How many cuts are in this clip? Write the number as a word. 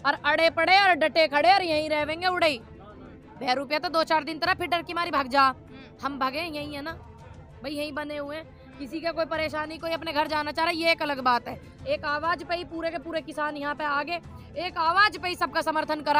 zero